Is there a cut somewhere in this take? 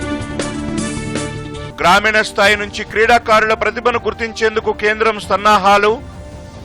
yes; 1 cut; at 1.5 s

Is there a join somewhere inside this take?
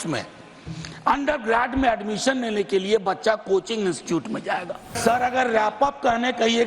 yes; 1 cut; at 5.0 s

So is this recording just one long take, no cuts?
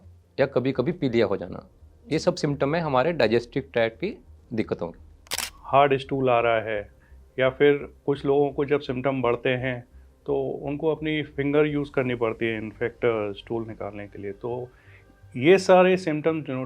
no; 1 cut; at 5.5 s

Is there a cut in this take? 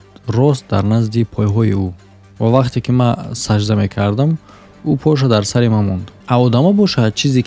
yes; 1 cut; at 6.1 s

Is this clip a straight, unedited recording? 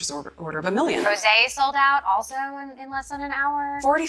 no; 1 cut; at 1.0 s

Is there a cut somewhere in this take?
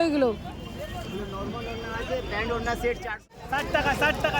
yes; 1 cut; at 3.3 s

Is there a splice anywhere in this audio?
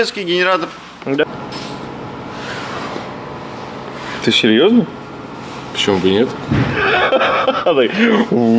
yes; 1 cut; at 1.2 s

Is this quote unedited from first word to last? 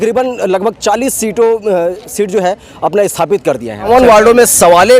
no; 1 cut; at 3.9 s

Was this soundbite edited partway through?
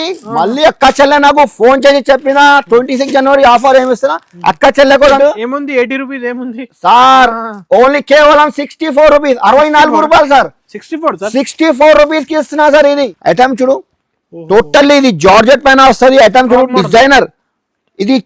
yes; 2 cuts; at 5.2 s, 12.9 s

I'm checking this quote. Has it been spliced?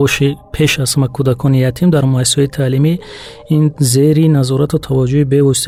no; 0 cuts

